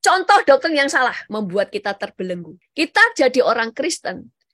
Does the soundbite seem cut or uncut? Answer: cut